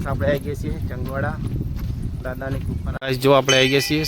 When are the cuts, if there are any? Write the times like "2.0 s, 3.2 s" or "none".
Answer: 3.0 s